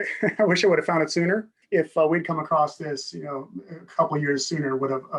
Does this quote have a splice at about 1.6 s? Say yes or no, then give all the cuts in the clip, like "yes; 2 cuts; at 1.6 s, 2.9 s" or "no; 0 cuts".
yes; 1 cut; at 1.6 s